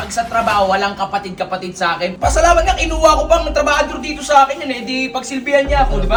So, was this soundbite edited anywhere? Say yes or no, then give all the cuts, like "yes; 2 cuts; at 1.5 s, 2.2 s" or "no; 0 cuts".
no; 0 cuts